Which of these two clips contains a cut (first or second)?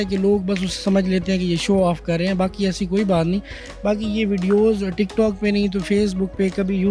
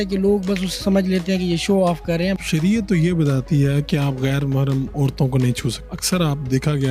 second